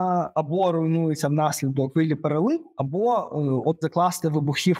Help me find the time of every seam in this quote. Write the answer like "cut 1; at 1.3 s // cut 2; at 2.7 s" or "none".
cut 1; at 1.9 s // cut 2; at 2.7 s // cut 3; at 3.8 s